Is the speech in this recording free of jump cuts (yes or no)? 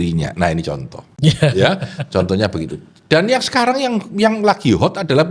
yes